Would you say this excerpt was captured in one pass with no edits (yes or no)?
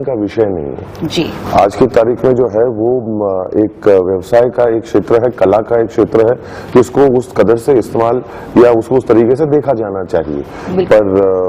yes